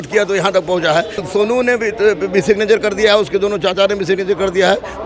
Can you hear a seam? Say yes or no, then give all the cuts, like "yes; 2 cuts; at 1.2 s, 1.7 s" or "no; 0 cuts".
yes; 1 cut; at 1.2 s